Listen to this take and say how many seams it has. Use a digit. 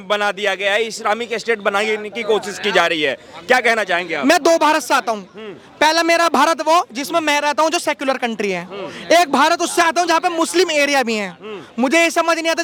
0